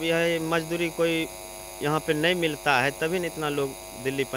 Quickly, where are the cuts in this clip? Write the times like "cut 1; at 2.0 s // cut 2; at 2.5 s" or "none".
none